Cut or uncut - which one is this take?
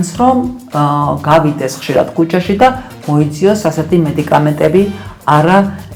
uncut